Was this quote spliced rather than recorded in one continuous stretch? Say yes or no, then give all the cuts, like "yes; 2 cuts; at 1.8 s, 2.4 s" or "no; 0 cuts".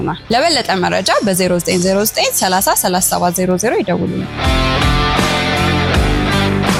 no; 0 cuts